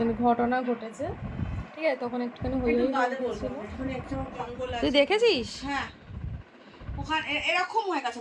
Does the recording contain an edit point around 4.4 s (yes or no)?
yes